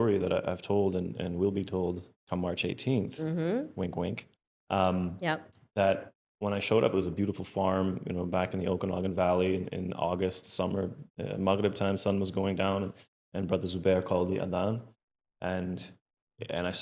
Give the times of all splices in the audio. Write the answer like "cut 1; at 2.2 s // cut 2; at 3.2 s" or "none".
none